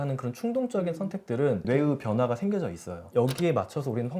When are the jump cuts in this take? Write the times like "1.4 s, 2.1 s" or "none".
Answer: 1.6 s, 3.1 s